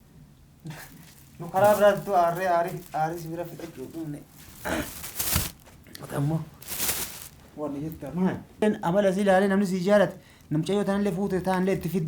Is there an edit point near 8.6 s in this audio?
yes; 1 cut; at 8.6 s

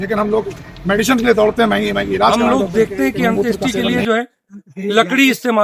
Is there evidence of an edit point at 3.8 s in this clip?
no; 1 cut; at 2.3 s

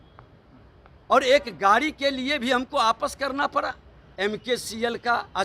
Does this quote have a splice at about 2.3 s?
no; 1 cut; at 4.0 s

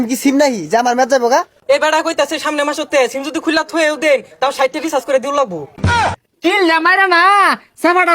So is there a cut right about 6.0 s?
yes; 2 cuts; at 1.5 s, 6.0 s

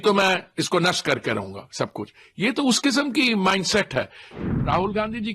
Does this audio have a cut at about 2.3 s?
no; 1 cut; at 4.3 s

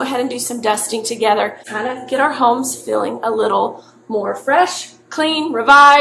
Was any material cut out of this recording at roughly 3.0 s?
no; 1 cut; at 1.7 s

